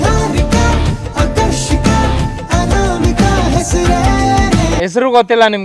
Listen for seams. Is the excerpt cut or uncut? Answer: uncut